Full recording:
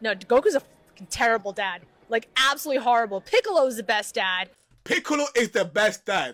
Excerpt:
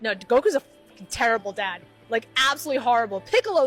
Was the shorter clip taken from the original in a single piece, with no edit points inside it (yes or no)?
yes